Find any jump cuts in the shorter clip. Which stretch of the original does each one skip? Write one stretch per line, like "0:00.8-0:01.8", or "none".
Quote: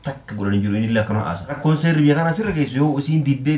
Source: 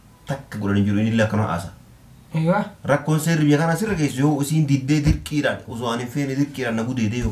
0:01.8-0:03.0